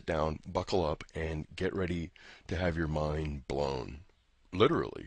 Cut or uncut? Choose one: cut